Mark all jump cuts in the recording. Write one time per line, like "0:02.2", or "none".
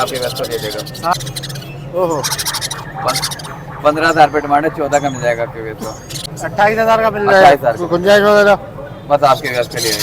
0:01.1
0:06.2